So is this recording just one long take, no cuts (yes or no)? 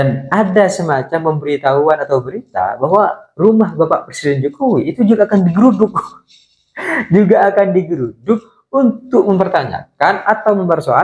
yes